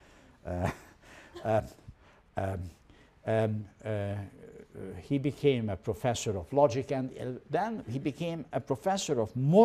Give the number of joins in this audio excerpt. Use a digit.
1